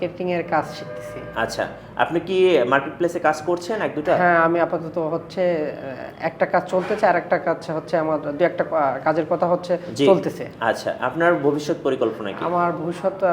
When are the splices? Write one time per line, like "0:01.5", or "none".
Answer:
none

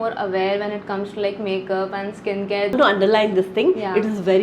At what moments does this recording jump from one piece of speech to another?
0:02.7

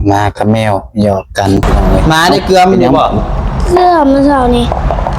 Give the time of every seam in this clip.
0:01.9

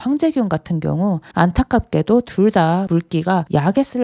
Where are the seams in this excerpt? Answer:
0:01.2
0:03.2

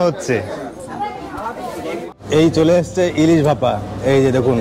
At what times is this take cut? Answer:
0:02.0

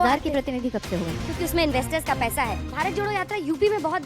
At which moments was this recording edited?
0:01.2
0:02.6

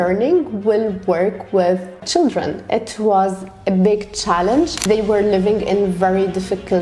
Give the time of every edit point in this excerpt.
0:01.9
0:04.8

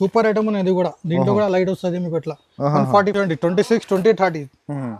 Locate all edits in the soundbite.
0:03.1

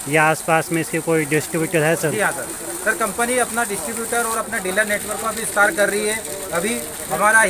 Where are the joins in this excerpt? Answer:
none

